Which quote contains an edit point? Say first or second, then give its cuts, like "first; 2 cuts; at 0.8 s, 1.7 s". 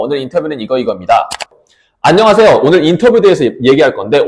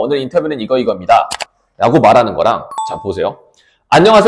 first; 1 cut; at 1.6 s